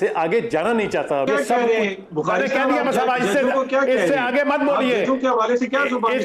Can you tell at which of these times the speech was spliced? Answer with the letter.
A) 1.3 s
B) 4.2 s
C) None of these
A